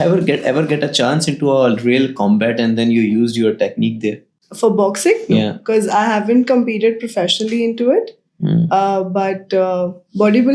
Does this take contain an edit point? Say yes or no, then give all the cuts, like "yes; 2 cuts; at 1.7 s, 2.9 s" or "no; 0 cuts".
no; 0 cuts